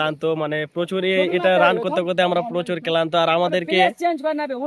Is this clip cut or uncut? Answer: uncut